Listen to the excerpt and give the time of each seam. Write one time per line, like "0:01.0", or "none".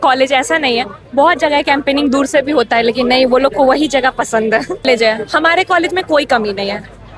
0:04.8